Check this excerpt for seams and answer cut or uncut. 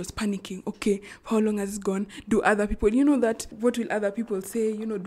uncut